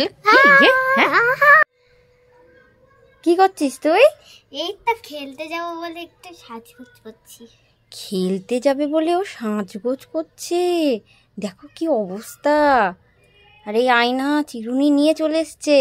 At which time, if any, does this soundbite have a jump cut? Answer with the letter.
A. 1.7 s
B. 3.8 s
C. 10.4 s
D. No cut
A